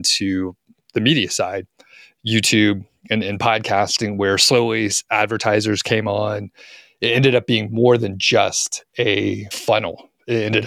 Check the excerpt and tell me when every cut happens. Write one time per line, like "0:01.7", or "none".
0:09.5